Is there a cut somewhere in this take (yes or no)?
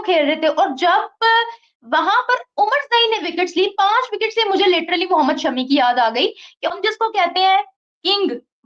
yes